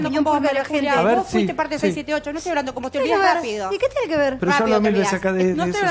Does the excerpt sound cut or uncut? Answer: uncut